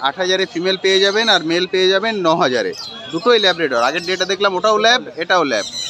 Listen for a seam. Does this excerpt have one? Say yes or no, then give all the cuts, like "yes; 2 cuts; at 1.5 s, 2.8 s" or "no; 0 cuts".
no; 0 cuts